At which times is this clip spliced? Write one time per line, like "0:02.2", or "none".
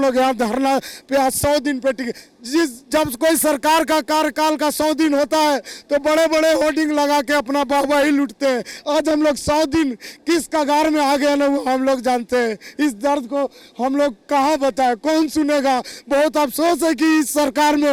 none